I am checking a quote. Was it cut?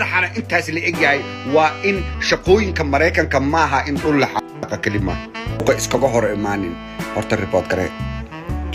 yes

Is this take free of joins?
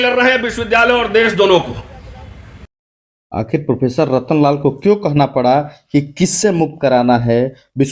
yes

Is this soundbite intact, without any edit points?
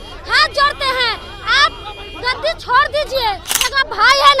no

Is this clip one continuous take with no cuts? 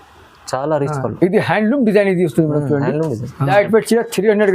no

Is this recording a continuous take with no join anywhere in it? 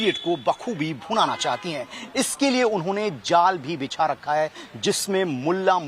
yes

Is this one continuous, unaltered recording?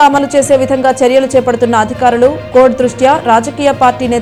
yes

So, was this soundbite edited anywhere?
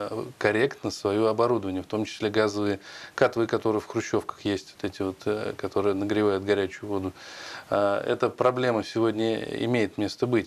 no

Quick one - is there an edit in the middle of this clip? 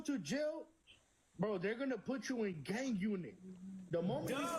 no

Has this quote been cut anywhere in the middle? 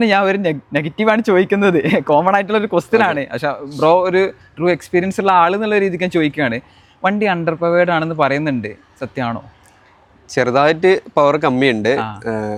no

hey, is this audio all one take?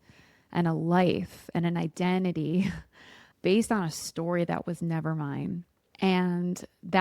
no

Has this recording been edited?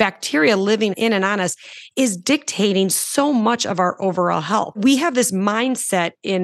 yes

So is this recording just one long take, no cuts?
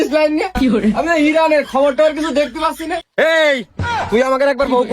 no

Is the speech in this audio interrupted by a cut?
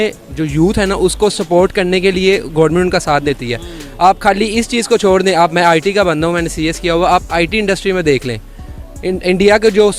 no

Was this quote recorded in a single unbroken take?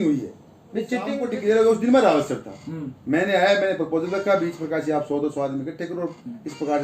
no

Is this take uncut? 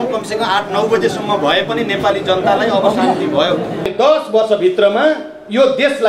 no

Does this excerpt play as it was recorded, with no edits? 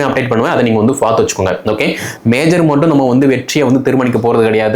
no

